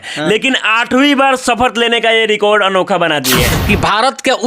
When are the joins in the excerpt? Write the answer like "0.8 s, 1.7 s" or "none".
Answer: 3.5 s